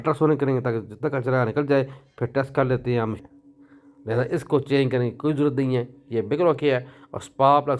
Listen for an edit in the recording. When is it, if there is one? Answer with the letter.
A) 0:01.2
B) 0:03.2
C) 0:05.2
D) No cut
B